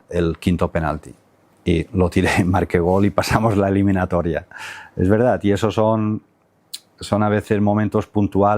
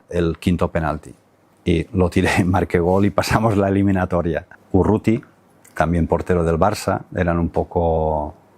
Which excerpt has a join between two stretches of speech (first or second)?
second